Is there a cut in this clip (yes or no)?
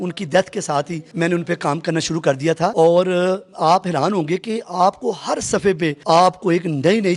yes